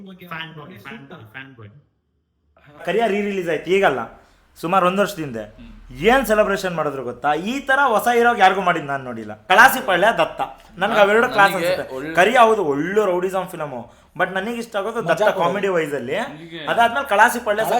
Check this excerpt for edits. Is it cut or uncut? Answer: cut